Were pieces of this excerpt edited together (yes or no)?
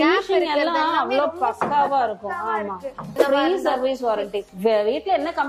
yes